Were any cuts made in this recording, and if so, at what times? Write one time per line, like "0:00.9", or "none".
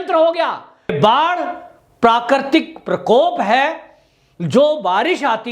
0:00.9

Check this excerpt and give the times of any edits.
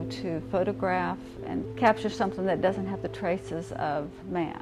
0:01.6

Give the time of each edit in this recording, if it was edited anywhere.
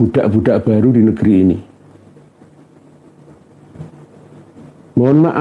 none

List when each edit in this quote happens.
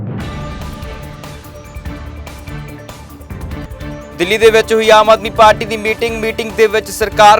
0:03.8

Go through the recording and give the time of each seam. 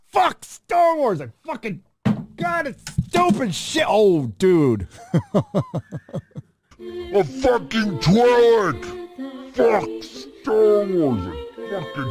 none

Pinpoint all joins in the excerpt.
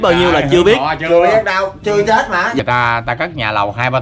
0:02.6

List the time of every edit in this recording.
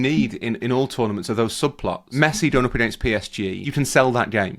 0:02.0
0:03.6

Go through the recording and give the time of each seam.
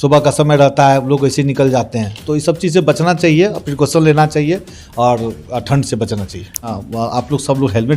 0:06.7

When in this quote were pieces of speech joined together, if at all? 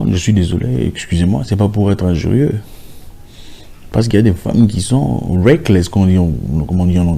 none

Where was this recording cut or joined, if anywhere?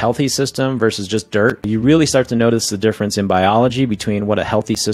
0:01.6

